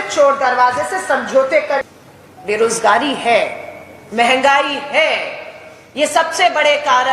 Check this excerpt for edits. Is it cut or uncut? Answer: cut